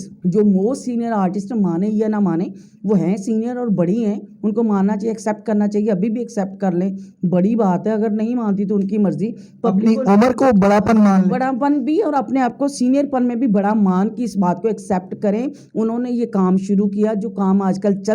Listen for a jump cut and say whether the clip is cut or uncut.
uncut